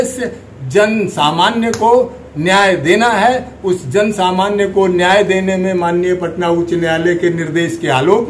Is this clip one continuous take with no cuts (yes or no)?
yes